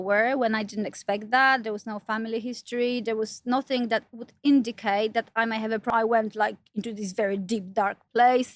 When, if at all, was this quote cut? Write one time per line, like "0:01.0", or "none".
0:05.9